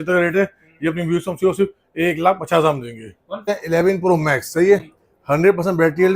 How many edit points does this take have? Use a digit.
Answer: 1